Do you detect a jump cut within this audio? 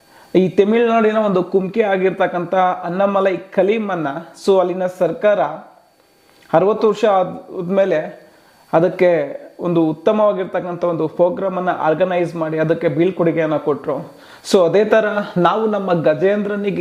no; 0 cuts

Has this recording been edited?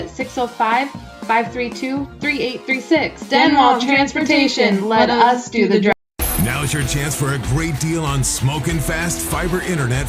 yes; 1 cut; at 5.9 s

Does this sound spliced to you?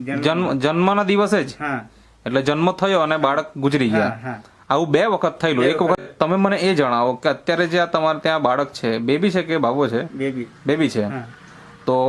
yes; 1 cut; at 6.0 s

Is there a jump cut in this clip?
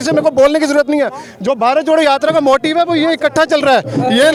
no; 0 cuts

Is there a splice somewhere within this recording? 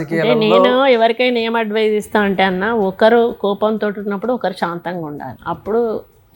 yes; 1 cut; at 5.3 s

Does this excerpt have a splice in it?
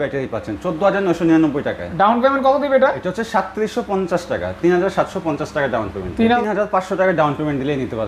yes; 1 cut; at 6.4 s

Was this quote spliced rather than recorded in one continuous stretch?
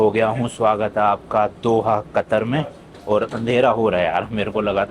no; 0 cuts

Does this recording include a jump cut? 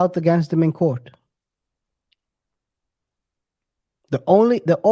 no; 0 cuts

